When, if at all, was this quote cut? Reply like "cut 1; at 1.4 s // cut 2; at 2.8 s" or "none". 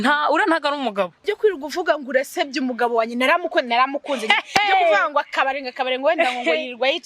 cut 1; at 1.2 s